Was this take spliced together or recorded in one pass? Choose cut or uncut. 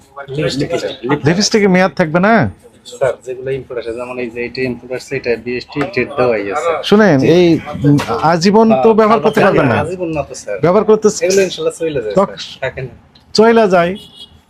uncut